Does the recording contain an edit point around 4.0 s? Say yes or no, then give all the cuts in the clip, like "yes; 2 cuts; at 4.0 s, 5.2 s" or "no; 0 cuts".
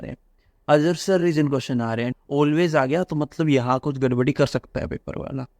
no; 1 cut; at 2.1 s